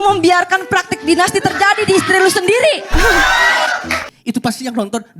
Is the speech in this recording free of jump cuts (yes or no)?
no